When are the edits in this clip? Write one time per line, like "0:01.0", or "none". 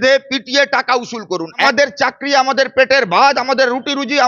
0:01.6